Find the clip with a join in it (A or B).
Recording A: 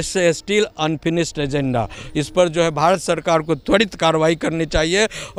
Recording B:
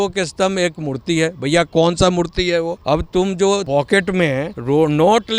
B